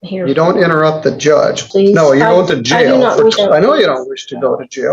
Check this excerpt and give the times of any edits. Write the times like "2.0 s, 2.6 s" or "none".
1.6 s, 3.4 s